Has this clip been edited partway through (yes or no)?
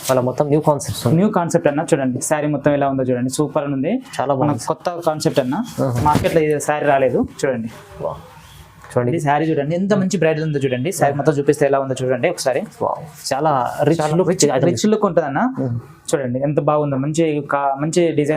yes